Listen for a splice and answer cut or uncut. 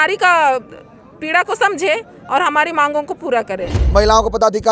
cut